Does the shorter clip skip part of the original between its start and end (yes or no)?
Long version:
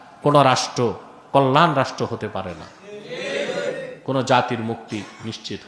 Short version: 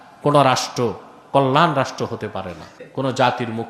yes